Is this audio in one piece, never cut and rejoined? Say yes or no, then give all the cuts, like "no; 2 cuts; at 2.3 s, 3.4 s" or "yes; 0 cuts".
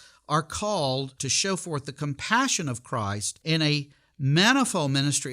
no; 2 cuts; at 1.2 s, 3.3 s